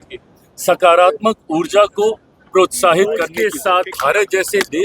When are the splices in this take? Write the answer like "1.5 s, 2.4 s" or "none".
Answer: 3.3 s